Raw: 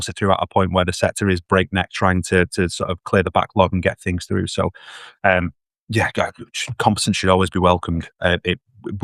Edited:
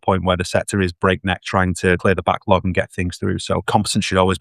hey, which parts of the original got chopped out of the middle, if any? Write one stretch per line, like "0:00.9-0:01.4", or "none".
0:02.5-0:03.1
0:04.7-0:06.8